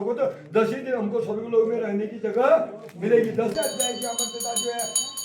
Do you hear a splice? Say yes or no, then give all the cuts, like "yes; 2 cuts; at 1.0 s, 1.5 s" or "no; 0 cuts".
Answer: yes; 1 cut; at 3.5 s